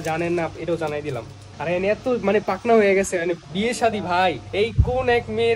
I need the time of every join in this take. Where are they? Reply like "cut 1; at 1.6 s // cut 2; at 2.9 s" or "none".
cut 1; at 1.4 s // cut 2; at 4.4 s